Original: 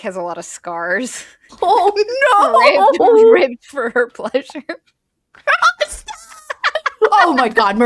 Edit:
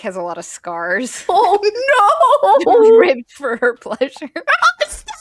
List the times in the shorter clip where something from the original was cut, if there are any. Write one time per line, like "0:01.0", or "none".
0:01.2
0:04.4